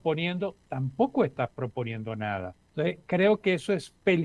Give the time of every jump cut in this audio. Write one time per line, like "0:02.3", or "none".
0:02.6